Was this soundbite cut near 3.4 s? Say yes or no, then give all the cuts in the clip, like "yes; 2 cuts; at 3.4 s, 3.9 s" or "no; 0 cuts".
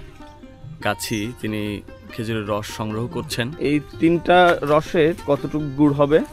yes; 2 cuts; at 3.4 s, 5.2 s